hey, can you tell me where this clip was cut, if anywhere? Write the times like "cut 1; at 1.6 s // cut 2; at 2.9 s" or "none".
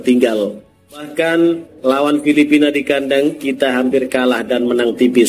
cut 1; at 1.1 s